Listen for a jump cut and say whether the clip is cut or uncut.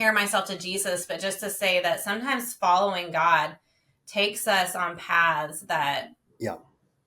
uncut